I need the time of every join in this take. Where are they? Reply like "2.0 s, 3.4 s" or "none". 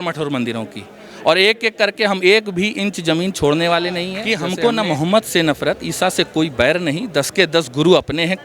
4.2 s